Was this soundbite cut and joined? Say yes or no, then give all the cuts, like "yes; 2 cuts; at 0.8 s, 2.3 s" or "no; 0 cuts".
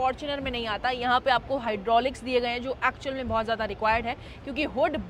no; 0 cuts